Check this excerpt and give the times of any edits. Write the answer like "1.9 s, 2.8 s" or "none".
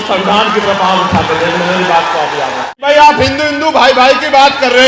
2.7 s, 3.8 s